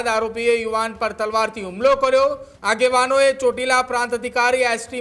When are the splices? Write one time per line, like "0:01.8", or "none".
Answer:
0:02.5